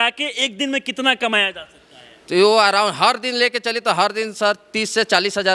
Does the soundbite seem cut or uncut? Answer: uncut